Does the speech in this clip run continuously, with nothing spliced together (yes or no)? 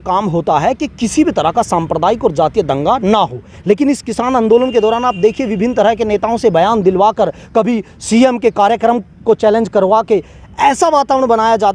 yes